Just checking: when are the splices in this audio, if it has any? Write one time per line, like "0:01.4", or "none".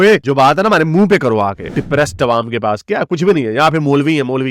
0:01.7